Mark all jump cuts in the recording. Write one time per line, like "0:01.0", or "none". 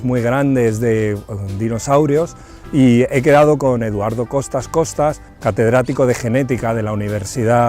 0:03.5